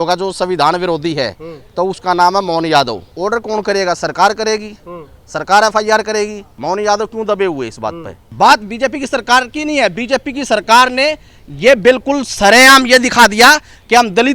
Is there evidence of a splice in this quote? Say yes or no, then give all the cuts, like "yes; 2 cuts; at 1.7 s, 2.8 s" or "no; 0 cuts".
yes; 3 cuts; at 3.1 s, 6.5 s, 8.2 s